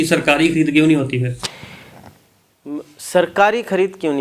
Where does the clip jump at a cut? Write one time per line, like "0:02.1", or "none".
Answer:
none